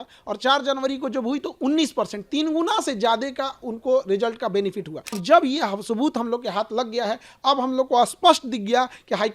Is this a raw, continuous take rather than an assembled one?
no; 1 cut; at 5.2 s

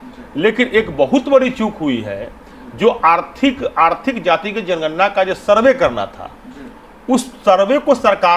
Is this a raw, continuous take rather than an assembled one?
yes; 0 cuts

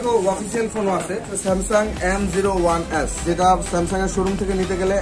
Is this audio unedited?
no; 2 cuts; at 1.3 s, 3.2 s

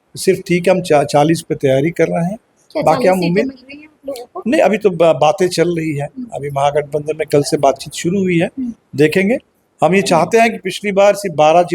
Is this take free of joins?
yes; 0 cuts

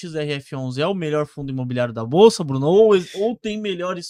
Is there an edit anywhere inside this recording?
no; 0 cuts

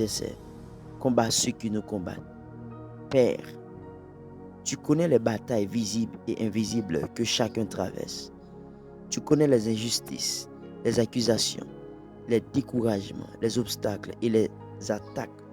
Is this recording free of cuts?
yes; 0 cuts

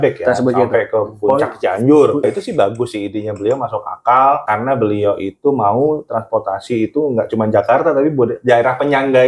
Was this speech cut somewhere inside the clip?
yes; 2 cuts; at 2.2 s, 4.4 s

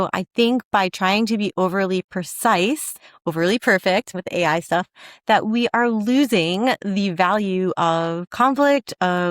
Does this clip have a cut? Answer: yes; 2 cuts; at 4.2 s, 8.2 s

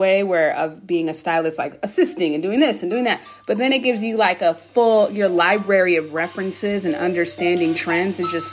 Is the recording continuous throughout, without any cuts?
yes; 0 cuts

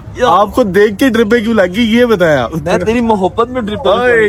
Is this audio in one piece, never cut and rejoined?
yes; 0 cuts

